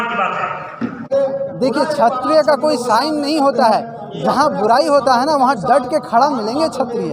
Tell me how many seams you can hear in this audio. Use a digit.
1